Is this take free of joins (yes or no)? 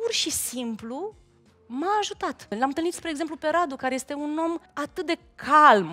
no